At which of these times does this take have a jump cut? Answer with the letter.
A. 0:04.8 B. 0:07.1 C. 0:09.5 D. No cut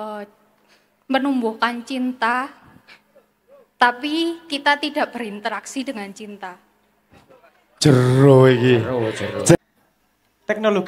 C